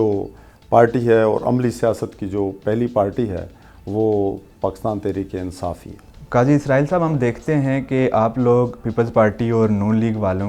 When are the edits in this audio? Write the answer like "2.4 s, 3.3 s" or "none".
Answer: none